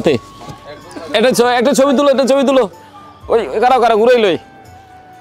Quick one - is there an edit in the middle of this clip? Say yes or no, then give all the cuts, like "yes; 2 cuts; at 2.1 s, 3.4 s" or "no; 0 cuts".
no; 0 cuts